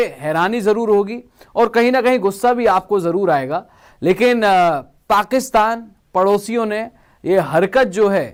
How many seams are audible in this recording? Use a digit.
0